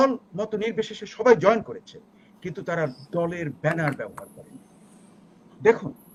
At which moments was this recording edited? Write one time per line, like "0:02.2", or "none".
none

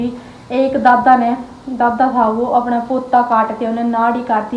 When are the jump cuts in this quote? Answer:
none

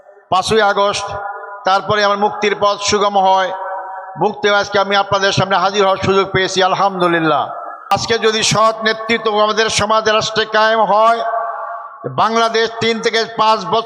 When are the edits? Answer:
0:07.9

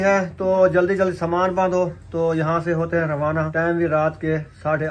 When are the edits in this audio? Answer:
0:03.5

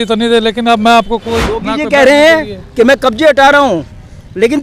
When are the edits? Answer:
0:01.6

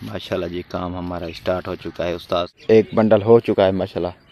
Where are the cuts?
0:02.6

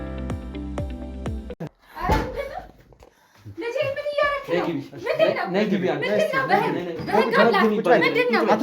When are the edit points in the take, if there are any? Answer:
0:01.6
0:04.7

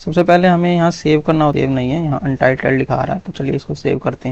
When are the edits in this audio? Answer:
0:01.5

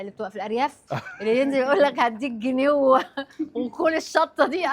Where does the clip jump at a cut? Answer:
none

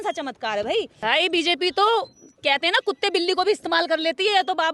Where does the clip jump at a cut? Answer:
0:01.0

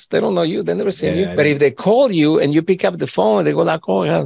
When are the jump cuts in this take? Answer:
0:01.3

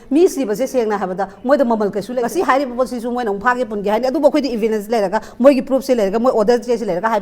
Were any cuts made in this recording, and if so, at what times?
0:02.2

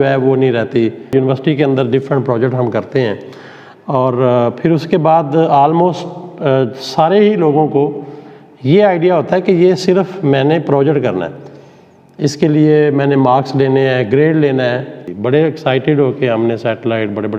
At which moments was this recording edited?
0:01.1
0:15.0

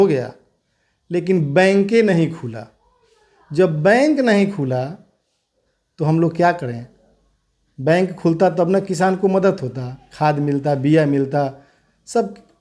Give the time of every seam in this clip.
none

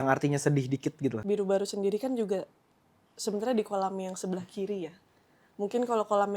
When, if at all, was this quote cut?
0:01.2

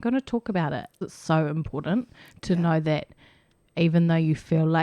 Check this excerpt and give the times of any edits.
0:01.0

